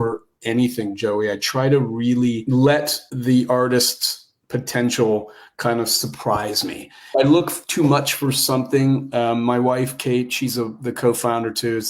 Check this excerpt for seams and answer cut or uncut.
cut